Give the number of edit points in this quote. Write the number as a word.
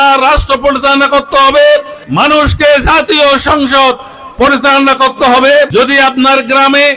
two